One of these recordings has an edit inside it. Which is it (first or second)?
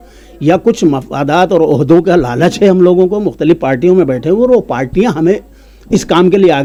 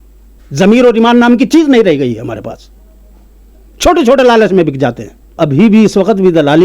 second